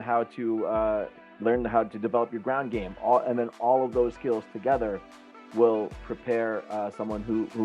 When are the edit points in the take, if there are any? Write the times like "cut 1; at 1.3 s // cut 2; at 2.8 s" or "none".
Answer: cut 1; at 1.2 s // cut 2; at 6.0 s